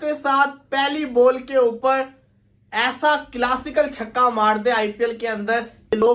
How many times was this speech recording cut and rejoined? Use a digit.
0